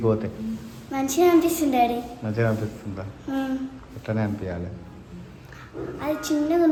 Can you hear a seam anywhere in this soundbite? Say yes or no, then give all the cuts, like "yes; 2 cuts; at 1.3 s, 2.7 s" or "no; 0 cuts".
no; 0 cuts